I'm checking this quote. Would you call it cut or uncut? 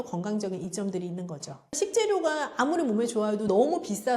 cut